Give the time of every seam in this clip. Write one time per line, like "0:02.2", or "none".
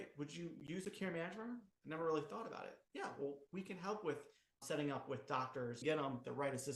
0:04.6
0:05.8